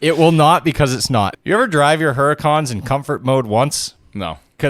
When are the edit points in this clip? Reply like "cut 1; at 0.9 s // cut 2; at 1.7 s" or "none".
cut 1; at 1.3 s